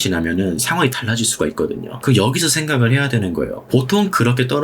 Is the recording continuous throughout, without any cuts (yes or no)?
no